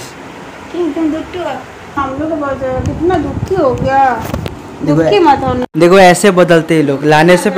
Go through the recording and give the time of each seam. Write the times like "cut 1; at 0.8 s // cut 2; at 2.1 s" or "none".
cut 1; at 2.0 s